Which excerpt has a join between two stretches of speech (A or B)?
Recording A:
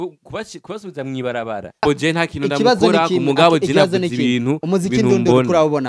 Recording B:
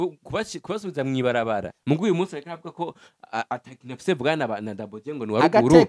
B